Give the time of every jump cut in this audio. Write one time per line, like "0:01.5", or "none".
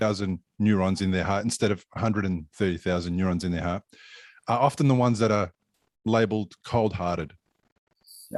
none